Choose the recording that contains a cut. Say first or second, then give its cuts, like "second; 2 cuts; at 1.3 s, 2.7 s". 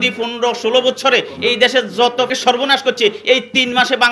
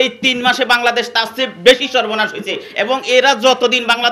first; 1 cut; at 2.3 s